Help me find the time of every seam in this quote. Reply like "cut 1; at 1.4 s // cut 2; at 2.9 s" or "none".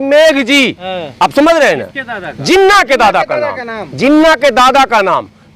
none